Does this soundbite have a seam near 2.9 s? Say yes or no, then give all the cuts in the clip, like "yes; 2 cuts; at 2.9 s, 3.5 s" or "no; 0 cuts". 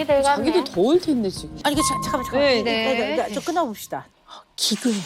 no; 2 cuts; at 1.5 s, 4.1 s